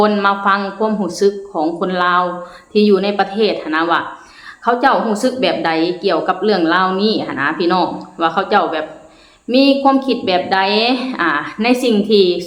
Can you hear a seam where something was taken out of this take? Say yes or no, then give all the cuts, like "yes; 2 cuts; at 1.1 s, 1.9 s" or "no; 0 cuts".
no; 0 cuts